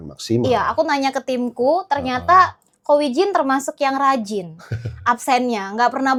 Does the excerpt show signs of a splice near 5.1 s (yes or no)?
no